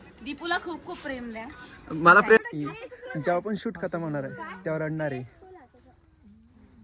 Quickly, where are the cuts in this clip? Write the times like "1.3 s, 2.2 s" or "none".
2.4 s